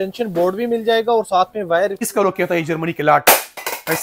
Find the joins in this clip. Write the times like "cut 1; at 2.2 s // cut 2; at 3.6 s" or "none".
cut 1; at 2.1 s